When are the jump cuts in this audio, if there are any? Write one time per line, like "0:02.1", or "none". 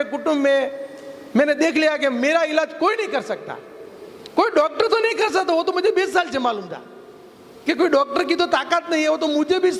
none